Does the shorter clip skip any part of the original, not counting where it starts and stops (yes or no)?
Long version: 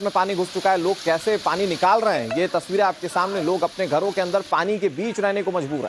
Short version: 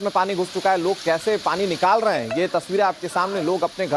no